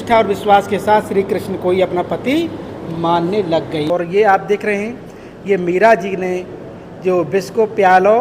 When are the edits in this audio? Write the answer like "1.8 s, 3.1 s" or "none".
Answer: 3.9 s